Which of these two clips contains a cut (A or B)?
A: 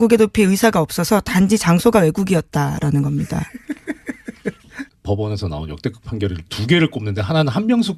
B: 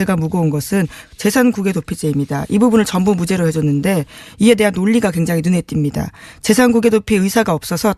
A